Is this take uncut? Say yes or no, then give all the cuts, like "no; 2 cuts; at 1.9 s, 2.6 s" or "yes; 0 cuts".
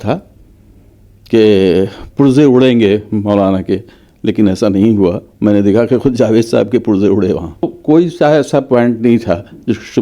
no; 1 cut; at 7.7 s